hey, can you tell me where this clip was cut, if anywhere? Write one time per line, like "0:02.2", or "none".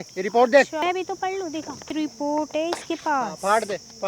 0:00.8
0:01.9

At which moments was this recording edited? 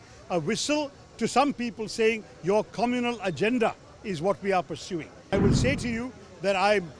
0:05.3

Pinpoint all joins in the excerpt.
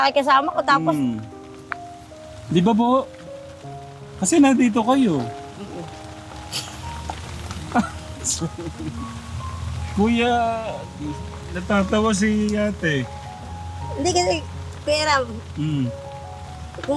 none

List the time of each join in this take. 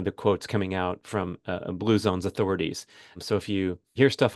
0:03.4

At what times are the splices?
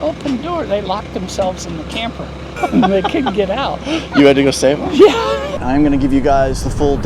0:02.4
0:05.5

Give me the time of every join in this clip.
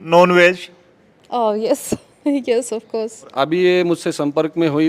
0:03.3

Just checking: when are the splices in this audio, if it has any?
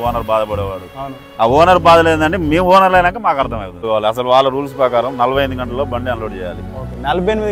0:03.8

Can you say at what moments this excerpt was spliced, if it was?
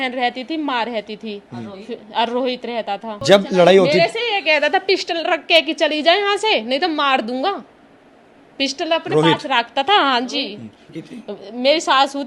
0:03.1
0:10.9

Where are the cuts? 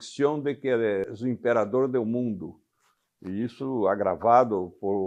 0:01.1

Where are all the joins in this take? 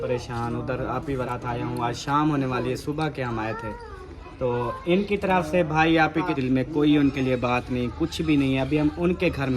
0:01.3
0:06.4

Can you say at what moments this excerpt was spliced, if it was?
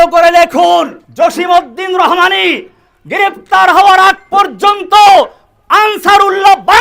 0:01.0

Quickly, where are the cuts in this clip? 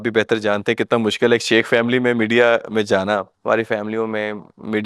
0:03.3

